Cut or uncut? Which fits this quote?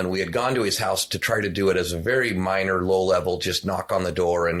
uncut